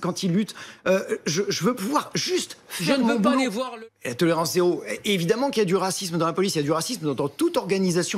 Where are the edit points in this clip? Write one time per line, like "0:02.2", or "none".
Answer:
0:03.7